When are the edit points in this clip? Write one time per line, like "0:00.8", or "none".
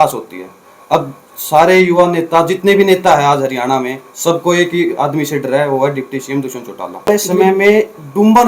0:07.1